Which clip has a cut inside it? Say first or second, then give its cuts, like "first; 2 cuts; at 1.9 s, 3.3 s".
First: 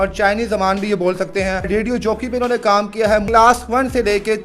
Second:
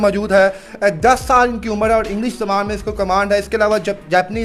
first; 2 cuts; at 1.7 s, 3.3 s